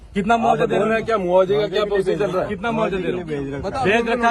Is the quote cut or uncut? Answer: uncut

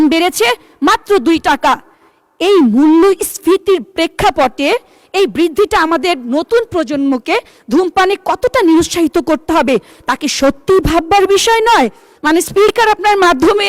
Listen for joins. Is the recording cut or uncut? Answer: cut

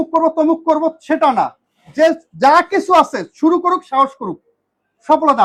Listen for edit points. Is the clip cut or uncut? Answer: uncut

